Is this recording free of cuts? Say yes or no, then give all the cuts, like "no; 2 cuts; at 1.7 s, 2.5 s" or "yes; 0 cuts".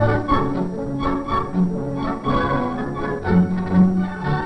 no; 1 cut; at 1.0 s